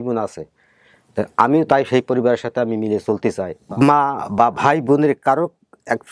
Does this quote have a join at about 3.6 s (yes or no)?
yes